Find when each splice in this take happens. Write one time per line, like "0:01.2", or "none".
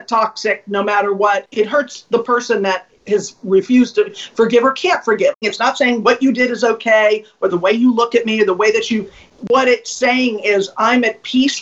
0:01.5
0:05.4